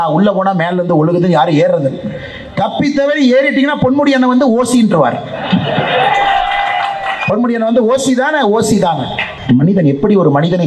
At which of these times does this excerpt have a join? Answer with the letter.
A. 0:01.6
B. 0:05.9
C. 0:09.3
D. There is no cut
C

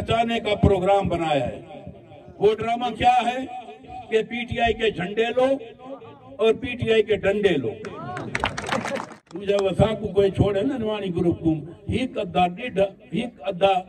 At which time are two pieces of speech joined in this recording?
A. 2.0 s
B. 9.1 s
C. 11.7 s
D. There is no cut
B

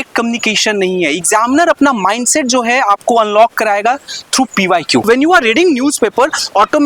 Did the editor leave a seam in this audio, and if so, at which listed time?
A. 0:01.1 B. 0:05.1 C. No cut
B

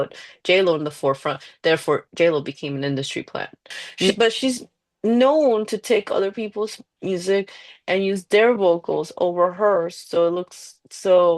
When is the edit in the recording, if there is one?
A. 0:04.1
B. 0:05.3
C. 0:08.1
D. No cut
A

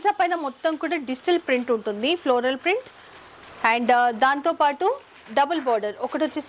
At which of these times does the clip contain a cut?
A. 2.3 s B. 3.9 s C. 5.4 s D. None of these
D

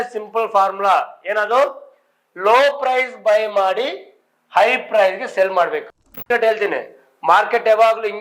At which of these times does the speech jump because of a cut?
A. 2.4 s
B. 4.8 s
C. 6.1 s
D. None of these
C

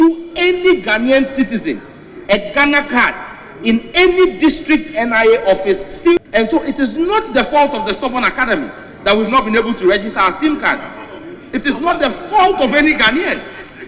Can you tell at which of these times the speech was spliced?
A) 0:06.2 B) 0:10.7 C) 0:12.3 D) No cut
A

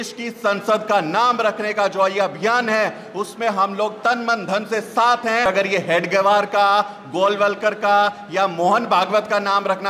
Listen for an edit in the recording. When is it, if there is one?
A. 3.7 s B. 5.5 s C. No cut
B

